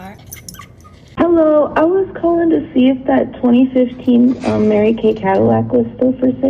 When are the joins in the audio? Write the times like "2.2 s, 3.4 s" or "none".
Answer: 1.2 s